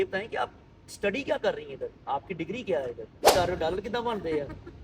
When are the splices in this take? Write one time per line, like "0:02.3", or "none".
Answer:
0:03.3